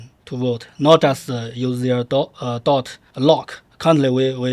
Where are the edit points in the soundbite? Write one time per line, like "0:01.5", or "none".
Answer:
0:03.2

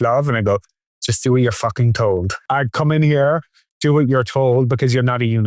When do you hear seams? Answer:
0:02.4

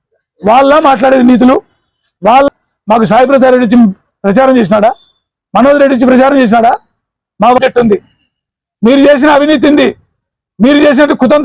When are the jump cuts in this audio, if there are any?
0:02.5
0:07.6

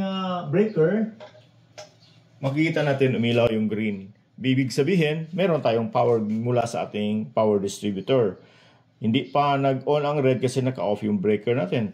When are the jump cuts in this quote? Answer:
none

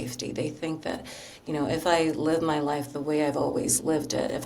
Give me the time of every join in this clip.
none

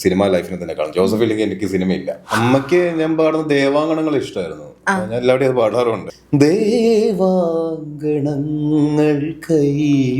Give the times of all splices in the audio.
0:02.2

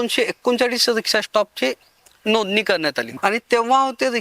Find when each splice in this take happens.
0:03.1

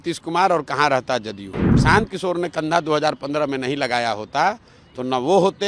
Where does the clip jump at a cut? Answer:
0:01.7

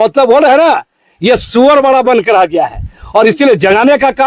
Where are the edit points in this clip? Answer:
none

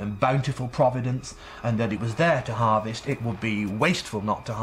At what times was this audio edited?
none

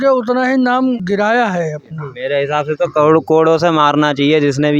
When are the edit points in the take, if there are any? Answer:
0:01.0
0:02.1

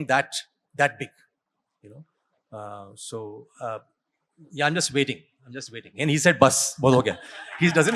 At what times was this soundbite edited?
none

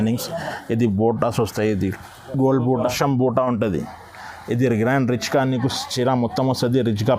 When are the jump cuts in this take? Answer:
0:02.8

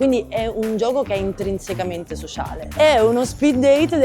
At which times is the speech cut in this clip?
0:02.6

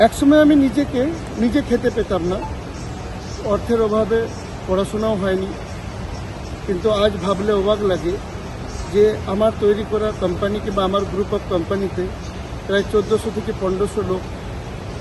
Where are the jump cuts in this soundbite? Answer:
none

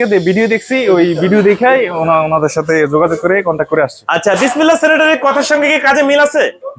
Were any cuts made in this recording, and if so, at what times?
none

